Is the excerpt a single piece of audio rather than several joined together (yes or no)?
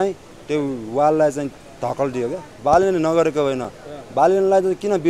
no